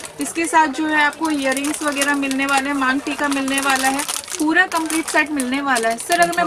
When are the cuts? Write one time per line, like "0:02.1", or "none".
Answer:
none